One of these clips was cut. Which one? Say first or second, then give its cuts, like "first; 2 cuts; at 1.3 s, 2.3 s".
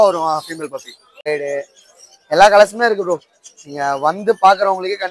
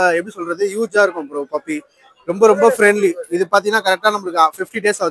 first; 1 cut; at 1.3 s